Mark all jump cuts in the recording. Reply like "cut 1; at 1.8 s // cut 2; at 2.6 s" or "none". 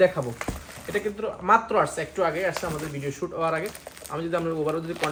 none